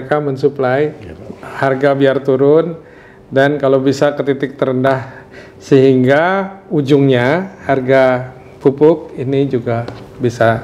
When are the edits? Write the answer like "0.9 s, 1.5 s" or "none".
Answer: none